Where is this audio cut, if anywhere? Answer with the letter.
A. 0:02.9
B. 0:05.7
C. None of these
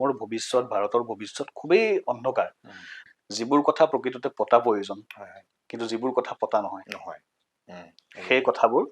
A